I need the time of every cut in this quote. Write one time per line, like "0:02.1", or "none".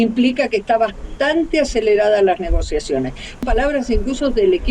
0:03.4